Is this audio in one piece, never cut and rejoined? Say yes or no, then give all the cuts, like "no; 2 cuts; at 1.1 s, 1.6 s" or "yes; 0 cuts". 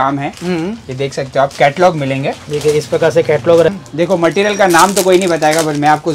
no; 1 cut; at 3.7 s